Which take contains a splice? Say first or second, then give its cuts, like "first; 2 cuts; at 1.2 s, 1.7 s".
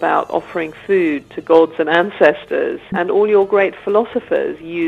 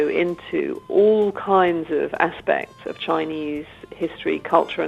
first; 1 cut; at 3.0 s